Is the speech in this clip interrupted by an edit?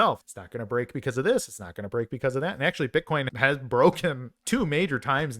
yes; 1 cut; at 3.3 s

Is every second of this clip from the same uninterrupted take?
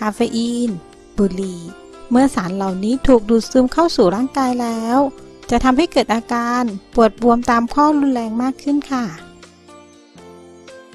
yes; 0 cuts

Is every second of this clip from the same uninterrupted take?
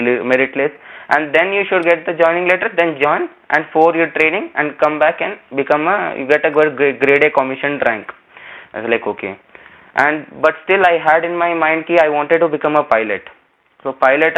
yes; 0 cuts

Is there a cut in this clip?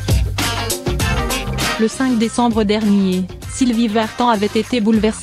yes; 1 cut; at 1.7 s

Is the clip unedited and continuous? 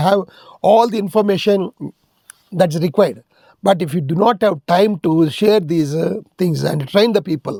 yes; 0 cuts

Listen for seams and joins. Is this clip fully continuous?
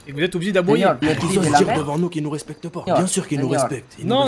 no; 2 cuts; at 1.0 s, 2.8 s

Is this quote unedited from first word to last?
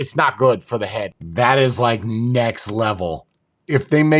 no; 1 cut; at 1.2 s

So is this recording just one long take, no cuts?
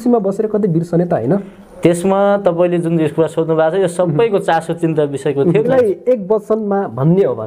no; 1 cut; at 5.7 s

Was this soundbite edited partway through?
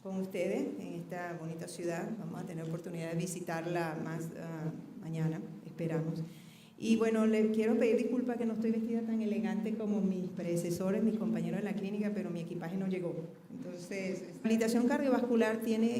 no; 0 cuts

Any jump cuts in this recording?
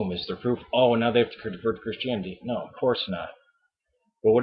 no; 0 cuts

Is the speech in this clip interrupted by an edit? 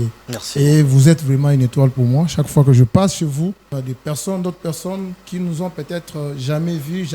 yes; 1 cut; at 3.7 s

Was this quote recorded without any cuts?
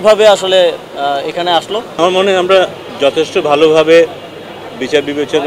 no; 1 cut; at 1.9 s

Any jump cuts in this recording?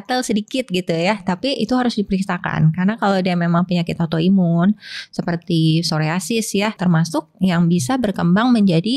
yes; 1 cut; at 6.8 s

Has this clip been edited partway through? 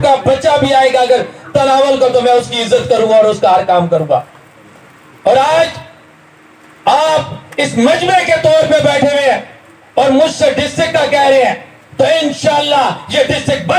no; 0 cuts

